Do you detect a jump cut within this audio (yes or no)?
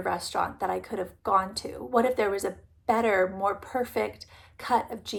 no